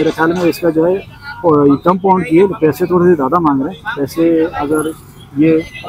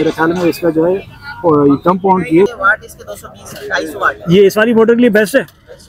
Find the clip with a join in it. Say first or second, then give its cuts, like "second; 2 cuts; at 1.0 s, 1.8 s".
second; 1 cut; at 2.5 s